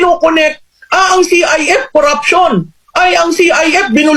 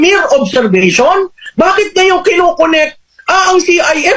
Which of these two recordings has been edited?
second; 1 cut; at 1.4 s

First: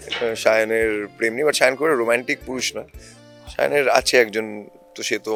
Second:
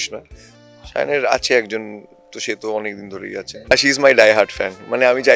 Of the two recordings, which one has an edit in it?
second; 1 cut; at 3.7 s

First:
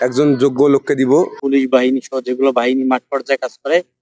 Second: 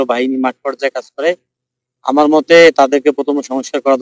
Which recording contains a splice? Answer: first; 1 cut; at 1.4 s

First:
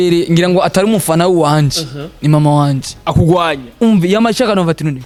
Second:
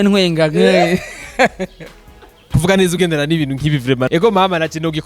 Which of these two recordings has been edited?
second; 2 cuts; at 2.5 s, 4.1 s

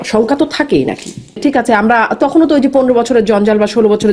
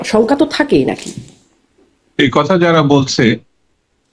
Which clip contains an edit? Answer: first; 1 cut; at 1.4 s

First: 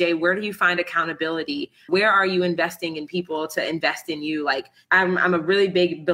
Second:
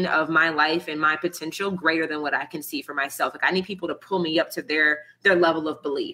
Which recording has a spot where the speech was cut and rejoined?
first; 2 cuts; at 1.8 s, 4.8 s

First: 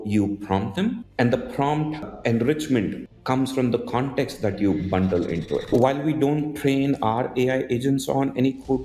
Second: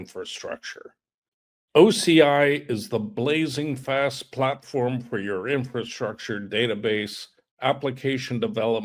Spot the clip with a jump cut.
first; 4 cuts; at 1.0 s, 2.1 s, 3.1 s, 5.7 s

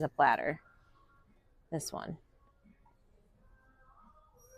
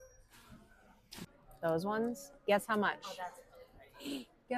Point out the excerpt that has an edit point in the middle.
second; 1 cut; at 1.2 s

